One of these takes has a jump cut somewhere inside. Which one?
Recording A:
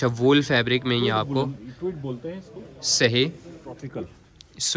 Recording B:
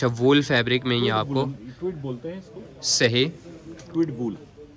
A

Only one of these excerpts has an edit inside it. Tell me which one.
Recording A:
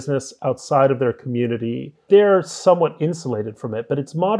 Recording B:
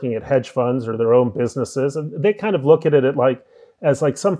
A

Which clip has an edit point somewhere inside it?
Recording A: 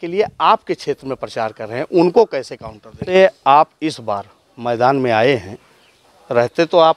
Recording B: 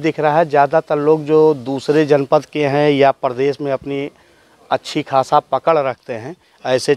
A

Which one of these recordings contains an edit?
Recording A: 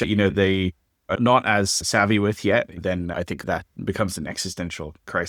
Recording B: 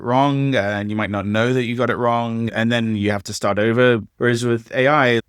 B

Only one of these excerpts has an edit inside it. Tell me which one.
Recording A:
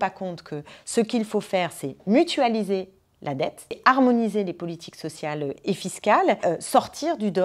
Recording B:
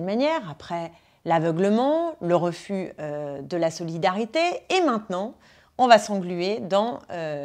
A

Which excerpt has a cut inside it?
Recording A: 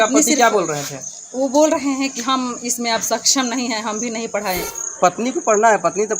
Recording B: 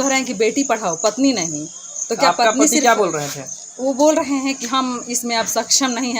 A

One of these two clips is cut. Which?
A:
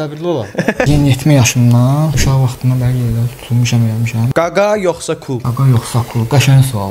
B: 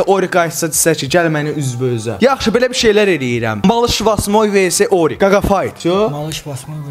A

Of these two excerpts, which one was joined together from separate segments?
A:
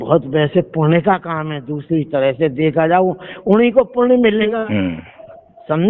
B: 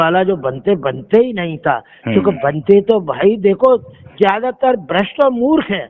A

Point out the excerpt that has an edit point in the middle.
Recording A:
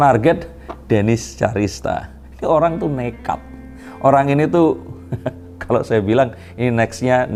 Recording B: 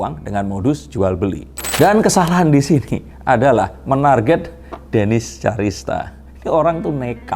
B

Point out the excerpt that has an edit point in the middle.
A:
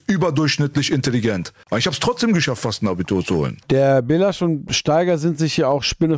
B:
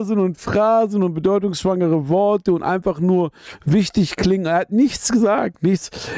A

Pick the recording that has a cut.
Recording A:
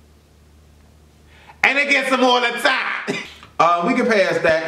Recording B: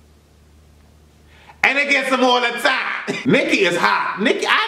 B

